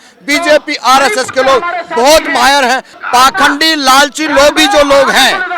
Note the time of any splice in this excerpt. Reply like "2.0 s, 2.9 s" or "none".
2.9 s